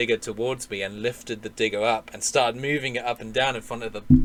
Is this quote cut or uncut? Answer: uncut